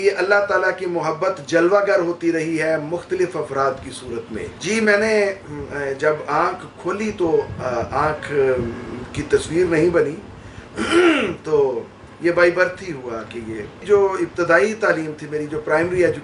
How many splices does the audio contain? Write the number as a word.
zero